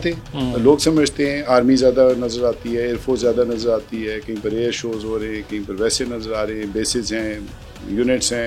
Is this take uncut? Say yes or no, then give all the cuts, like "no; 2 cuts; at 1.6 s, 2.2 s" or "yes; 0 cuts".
yes; 0 cuts